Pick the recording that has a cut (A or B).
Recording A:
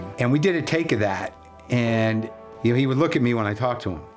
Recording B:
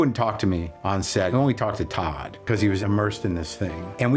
A